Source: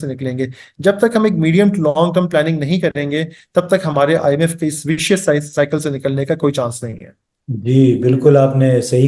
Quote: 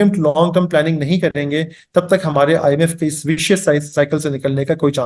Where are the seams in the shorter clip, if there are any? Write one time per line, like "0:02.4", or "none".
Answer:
none